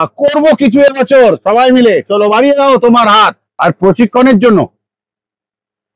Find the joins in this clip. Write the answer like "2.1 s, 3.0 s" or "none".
3.4 s